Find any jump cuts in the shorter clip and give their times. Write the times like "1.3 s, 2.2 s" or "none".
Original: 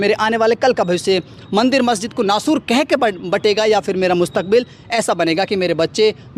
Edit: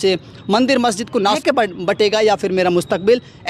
1.4 s